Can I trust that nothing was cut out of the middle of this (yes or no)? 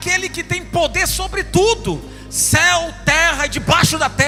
yes